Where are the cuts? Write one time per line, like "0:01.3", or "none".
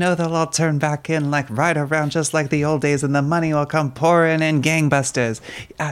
none